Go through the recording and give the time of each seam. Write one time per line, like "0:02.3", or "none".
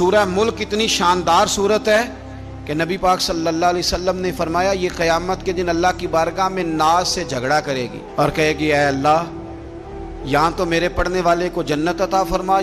none